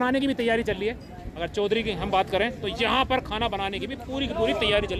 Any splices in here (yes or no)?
no